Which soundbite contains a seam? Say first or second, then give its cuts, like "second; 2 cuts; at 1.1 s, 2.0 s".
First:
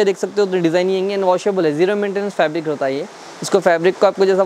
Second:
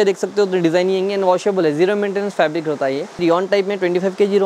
second; 1 cut; at 3.2 s